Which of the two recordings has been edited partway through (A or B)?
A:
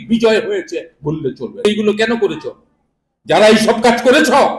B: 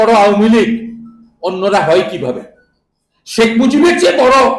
A